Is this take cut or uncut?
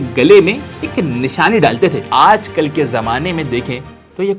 cut